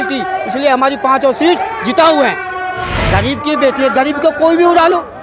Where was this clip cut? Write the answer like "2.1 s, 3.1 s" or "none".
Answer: 2.9 s